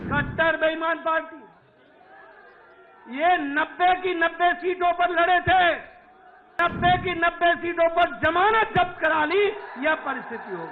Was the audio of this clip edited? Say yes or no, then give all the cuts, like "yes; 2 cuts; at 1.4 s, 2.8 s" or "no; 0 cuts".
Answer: yes; 1 cut; at 6.5 s